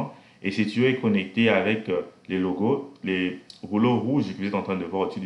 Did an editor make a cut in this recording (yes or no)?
no